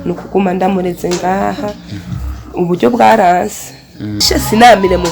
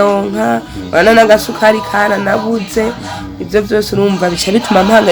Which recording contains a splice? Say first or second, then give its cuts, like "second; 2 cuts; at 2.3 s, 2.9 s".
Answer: first; 1 cut; at 4.2 s